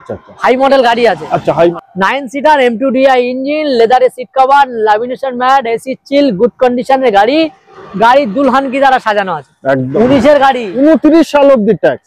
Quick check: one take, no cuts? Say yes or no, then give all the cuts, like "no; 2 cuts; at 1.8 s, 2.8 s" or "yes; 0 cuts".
no; 2 cuts; at 1.7 s, 9.9 s